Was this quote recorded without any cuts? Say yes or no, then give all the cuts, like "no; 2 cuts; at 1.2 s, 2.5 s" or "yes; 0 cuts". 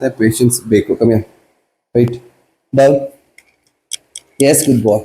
yes; 0 cuts